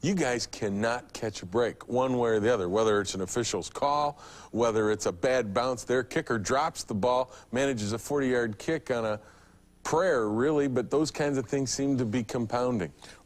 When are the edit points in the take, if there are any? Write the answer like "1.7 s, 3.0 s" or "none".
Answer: 8.0 s